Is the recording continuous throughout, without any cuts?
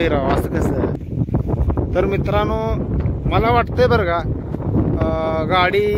no; 1 cut; at 1.0 s

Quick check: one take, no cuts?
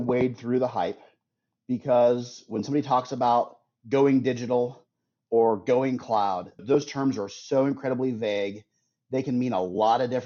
yes; 0 cuts

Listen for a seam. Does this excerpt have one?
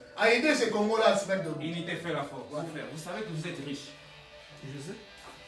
yes; 1 cut; at 2.6 s

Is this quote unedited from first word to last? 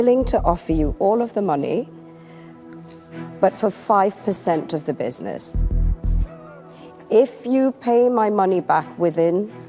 yes; 0 cuts

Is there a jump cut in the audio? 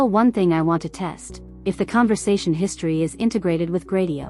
no; 0 cuts

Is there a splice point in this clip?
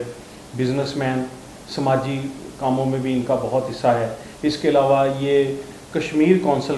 no; 0 cuts

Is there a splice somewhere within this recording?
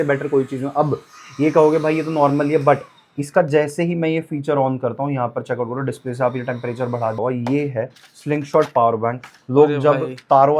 yes; 1 cut; at 7.2 s

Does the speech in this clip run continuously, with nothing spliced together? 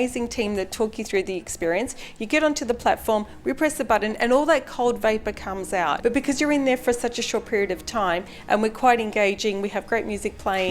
no; 1 cut; at 6.0 s

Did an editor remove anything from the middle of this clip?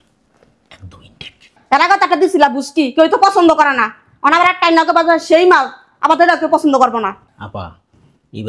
no; 0 cuts

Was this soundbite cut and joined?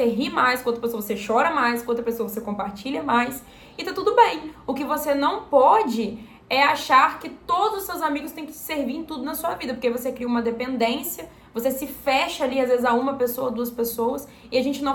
no; 0 cuts

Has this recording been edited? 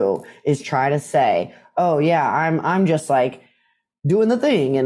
no; 0 cuts

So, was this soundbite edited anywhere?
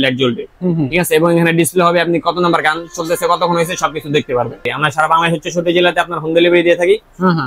yes; 1 cut; at 4.7 s

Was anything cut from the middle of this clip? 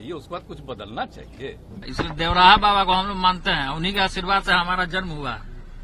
yes; 1 cut; at 1.8 s

